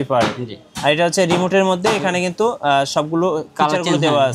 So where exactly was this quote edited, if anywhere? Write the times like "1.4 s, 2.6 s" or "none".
none